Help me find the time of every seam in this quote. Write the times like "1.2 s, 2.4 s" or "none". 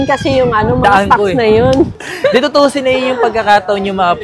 1.9 s